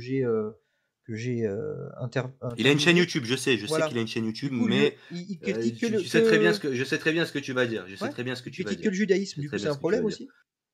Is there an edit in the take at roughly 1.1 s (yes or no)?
no